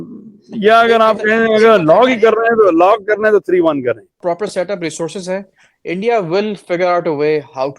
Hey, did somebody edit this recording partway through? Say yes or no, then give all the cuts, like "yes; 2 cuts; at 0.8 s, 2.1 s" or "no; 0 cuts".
yes; 1 cut; at 4.2 s